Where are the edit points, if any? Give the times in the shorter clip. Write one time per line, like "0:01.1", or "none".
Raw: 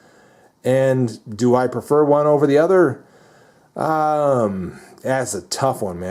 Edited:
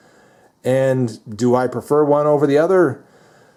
none